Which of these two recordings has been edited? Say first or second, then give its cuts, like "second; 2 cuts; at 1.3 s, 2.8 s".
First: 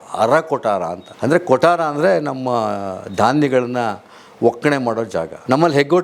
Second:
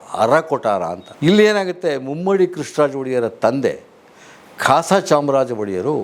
second; 1 cut; at 1.1 s